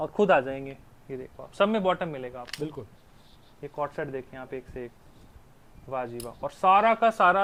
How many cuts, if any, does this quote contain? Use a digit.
0